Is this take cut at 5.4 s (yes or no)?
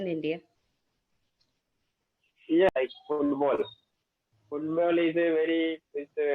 no